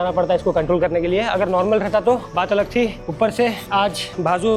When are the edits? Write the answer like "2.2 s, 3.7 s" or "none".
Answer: none